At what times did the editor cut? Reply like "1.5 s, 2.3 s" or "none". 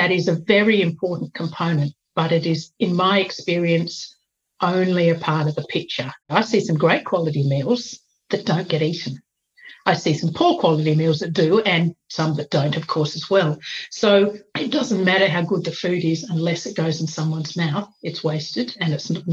6.2 s